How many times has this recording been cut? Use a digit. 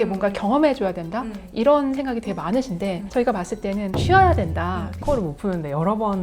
2